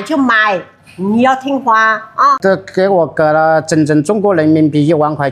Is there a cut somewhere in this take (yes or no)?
yes